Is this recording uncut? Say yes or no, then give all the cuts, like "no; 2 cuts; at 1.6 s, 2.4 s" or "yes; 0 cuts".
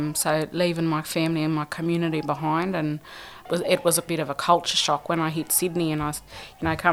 no; 1 cut; at 4.1 s